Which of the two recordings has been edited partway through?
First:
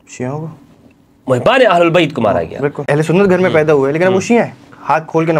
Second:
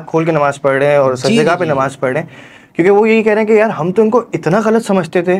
first; 1 cut; at 2.8 s

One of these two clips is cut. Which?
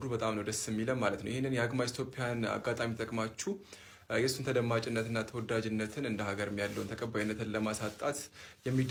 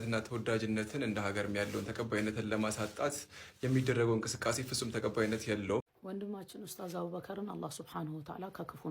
second; 1 cut; at 5.8 s

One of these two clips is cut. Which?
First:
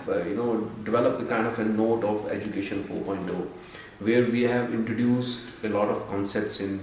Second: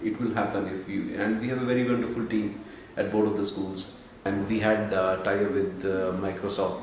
second; 1 cut; at 4.3 s

